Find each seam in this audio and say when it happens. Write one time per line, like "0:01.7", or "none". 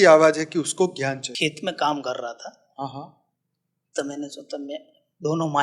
0:01.3